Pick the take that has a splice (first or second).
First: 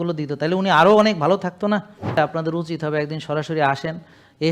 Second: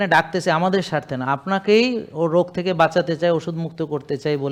first